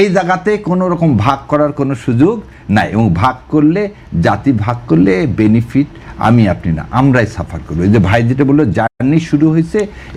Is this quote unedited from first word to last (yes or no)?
yes